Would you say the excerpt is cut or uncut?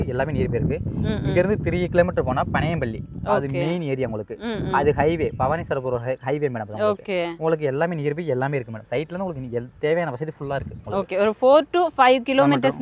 uncut